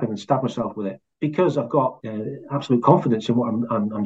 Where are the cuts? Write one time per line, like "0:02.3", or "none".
0:01.0
0:02.1